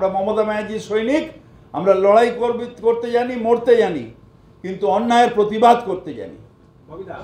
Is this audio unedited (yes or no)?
yes